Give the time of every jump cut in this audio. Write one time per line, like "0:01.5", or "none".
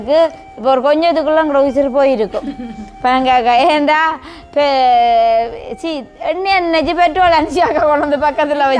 none